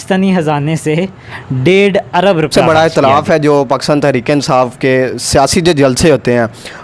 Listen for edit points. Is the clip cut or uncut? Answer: cut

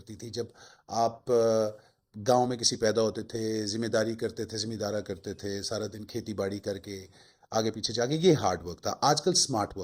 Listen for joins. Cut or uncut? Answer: uncut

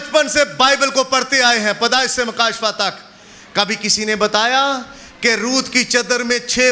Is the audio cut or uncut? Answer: uncut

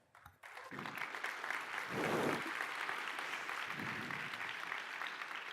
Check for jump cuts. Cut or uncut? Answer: cut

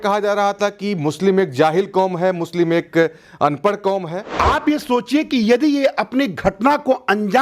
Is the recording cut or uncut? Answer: cut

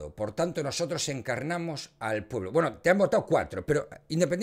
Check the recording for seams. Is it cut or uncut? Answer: uncut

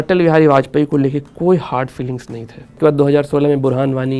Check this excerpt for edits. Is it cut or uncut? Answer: cut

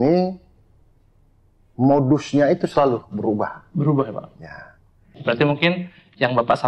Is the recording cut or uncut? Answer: cut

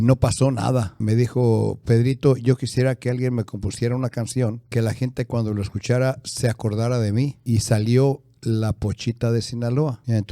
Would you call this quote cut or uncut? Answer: cut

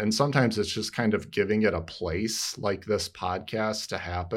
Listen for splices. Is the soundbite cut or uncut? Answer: uncut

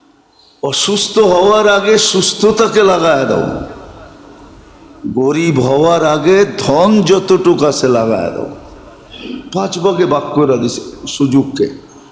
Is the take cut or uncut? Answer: uncut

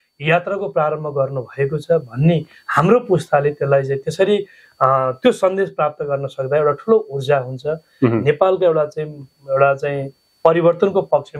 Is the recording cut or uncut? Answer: uncut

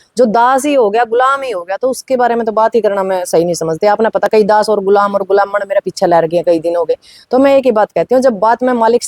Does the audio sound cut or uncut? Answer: uncut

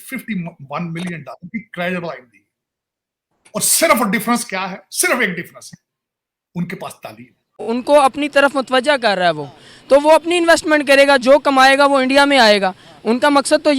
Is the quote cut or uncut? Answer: cut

